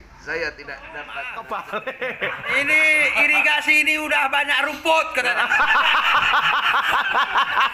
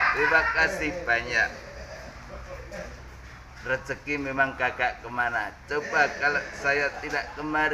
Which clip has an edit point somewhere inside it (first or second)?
first